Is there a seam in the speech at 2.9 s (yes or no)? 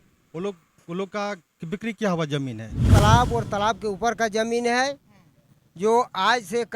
yes